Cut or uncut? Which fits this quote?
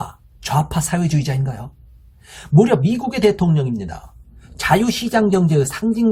uncut